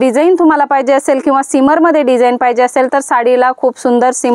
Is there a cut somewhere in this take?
no; 0 cuts

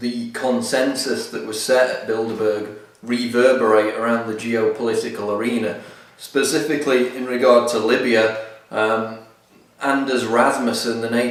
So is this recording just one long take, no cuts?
yes; 0 cuts

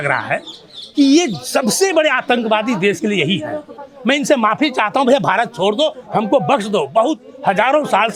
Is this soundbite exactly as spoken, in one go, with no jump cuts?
yes; 0 cuts

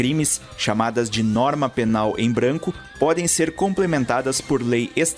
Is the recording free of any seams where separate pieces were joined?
no; 1 cut; at 2.8 s

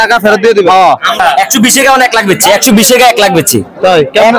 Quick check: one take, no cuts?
no; 1 cut; at 1.2 s

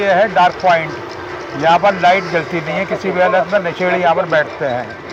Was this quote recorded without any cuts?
yes; 0 cuts

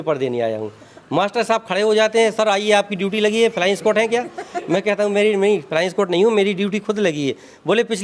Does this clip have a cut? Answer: no; 0 cuts

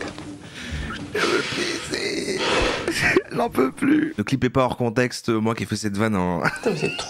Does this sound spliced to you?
yes; 1 cut; at 4.1 s

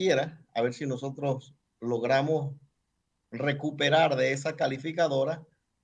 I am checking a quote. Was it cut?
no; 0 cuts

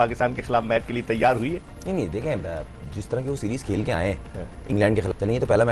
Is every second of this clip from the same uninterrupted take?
yes; 0 cuts

